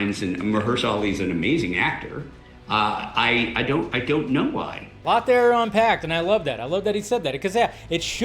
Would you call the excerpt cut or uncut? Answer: cut